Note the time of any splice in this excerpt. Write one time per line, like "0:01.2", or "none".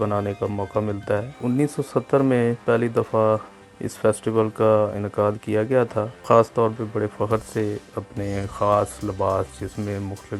0:01.4
0:06.2